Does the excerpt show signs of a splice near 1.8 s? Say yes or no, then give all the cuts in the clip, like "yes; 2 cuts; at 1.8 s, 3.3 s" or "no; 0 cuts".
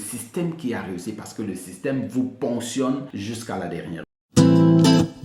no; 2 cuts; at 3.1 s, 4.1 s